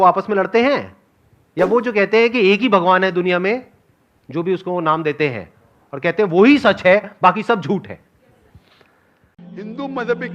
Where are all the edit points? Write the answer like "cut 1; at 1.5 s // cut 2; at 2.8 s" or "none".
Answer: cut 1; at 9.3 s

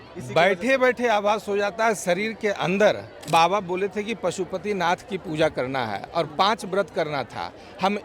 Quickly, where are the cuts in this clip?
cut 1; at 3.1 s

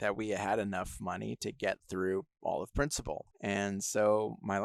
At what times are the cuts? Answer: none

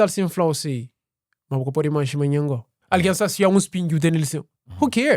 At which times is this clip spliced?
cut 1; at 2.7 s

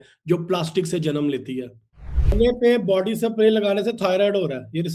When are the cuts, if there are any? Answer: cut 1; at 2.3 s

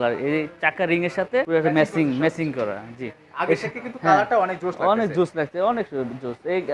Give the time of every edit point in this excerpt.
cut 1; at 1.5 s

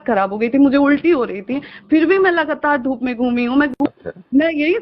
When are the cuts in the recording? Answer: cut 1; at 3.7 s

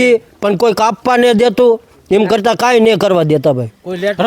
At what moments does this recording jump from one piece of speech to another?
none

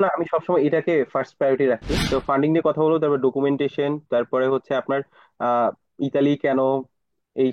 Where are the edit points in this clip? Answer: cut 1; at 1.9 s

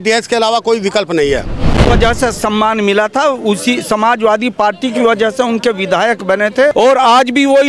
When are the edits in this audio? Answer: cut 1; at 1.9 s // cut 2; at 6.7 s

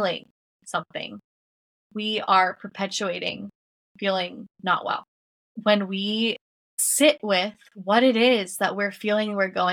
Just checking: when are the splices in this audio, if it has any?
cut 1; at 5.5 s // cut 2; at 6.8 s

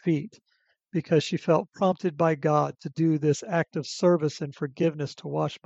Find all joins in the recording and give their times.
none

